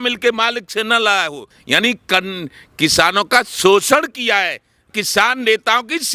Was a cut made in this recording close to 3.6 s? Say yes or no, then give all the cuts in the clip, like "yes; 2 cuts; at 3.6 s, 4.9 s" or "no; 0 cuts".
no; 2 cuts; at 1.5 s, 4.9 s